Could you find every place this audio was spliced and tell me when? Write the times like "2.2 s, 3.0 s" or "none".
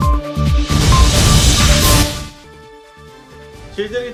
none